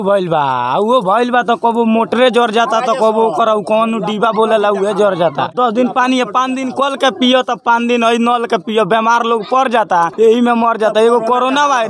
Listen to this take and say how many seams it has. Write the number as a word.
zero